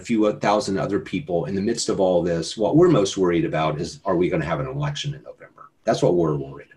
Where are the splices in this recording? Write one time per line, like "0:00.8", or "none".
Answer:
none